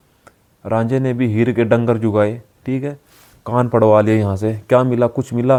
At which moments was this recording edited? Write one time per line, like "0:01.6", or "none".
none